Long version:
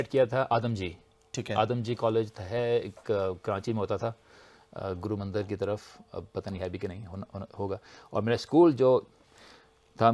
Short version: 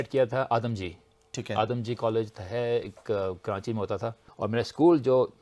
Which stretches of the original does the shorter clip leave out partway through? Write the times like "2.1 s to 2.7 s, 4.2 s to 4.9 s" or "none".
4.2 s to 8.0 s